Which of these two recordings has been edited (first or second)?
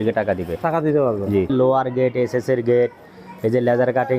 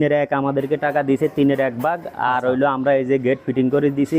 first